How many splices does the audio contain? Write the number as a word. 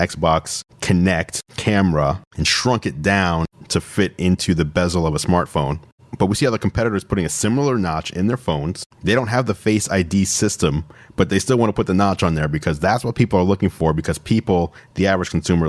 zero